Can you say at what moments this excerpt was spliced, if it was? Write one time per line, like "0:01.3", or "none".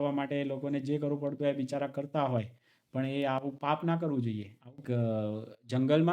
0:04.8